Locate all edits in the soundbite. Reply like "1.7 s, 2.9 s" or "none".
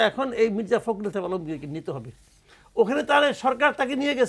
none